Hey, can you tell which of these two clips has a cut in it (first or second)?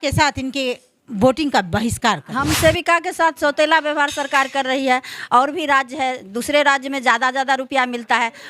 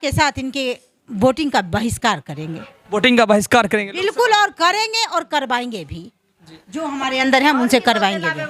first